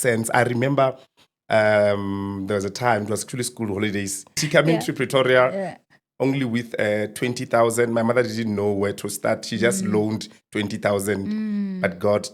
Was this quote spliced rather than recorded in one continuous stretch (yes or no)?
yes